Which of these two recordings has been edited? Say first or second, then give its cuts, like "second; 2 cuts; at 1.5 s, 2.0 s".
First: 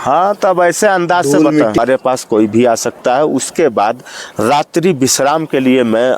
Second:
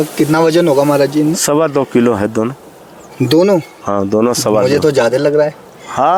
first; 1 cut; at 1.8 s